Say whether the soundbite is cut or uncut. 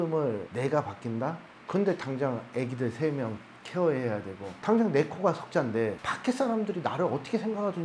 cut